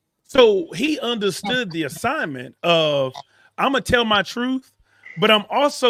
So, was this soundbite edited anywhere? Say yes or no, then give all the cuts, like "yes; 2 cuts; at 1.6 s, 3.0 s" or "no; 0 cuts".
no; 0 cuts